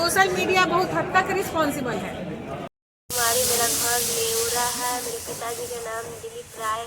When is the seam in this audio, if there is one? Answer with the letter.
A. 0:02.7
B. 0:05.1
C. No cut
A